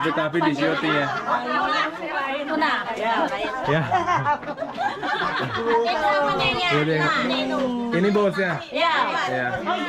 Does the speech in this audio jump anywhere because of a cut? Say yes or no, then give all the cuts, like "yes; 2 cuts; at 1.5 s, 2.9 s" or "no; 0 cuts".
no; 0 cuts